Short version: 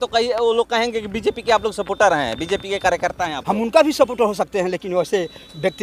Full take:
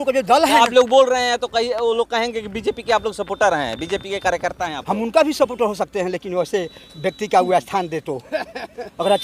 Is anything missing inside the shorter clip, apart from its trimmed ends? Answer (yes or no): no